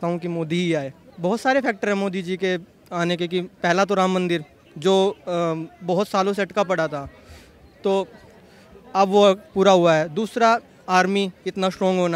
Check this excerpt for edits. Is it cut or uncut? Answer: cut